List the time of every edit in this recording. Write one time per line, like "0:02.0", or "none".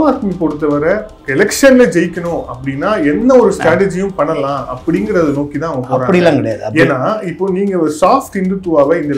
0:01.1